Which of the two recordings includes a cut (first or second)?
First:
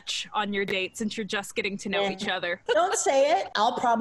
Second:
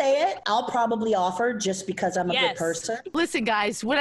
second